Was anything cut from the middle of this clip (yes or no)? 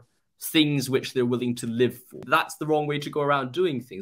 yes